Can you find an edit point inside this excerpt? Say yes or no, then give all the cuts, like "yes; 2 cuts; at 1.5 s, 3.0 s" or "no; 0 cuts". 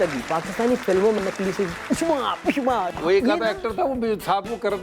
yes; 2 cuts; at 1.2 s, 2.9 s